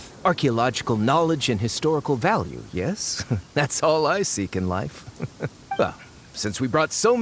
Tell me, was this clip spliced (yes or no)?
no